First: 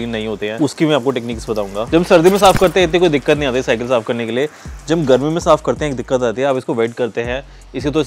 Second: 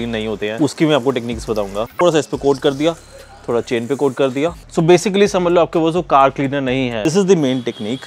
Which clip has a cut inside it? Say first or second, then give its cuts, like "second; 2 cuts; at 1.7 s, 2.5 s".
second; 3 cuts; at 1.8 s, 4.6 s, 7.0 s